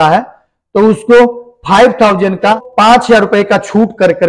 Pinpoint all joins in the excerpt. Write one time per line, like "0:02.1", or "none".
0:02.5

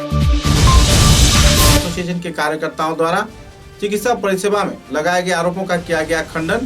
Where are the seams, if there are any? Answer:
0:01.7

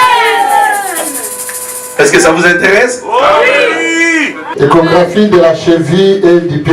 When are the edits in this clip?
0:04.4

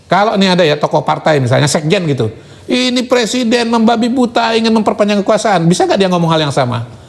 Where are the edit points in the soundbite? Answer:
none

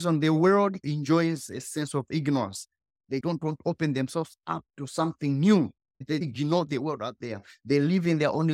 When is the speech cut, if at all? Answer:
0:03.1
0:06.2

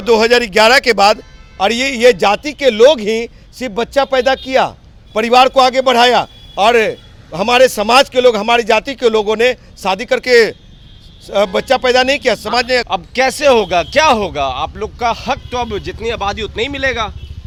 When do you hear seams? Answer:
none

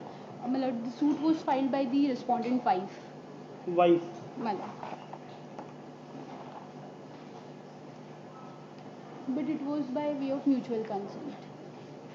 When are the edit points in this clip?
none

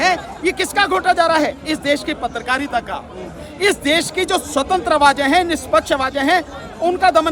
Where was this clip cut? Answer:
none

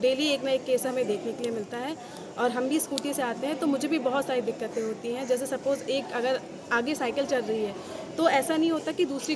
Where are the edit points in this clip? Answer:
none

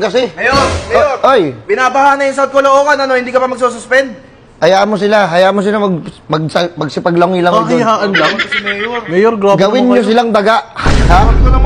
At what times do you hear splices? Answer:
none

